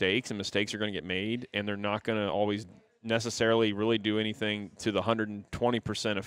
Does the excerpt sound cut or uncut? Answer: uncut